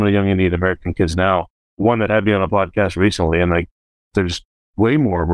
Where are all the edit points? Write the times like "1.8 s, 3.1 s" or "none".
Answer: 1.6 s